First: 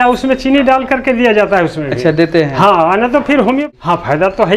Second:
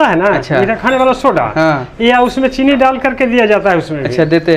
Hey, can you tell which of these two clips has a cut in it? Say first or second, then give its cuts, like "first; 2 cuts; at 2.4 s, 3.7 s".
first; 1 cut; at 3.6 s